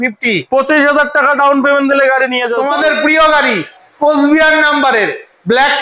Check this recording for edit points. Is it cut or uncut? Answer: cut